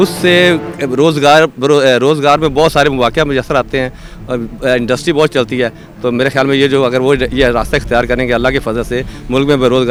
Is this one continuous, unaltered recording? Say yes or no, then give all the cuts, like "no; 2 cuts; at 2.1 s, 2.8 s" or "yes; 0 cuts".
yes; 0 cuts